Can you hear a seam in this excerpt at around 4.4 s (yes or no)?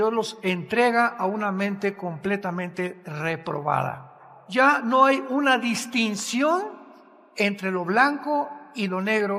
yes